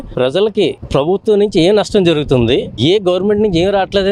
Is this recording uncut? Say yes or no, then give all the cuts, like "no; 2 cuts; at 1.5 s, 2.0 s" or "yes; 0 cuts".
yes; 0 cuts